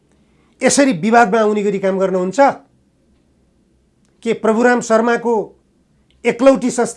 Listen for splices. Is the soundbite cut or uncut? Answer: uncut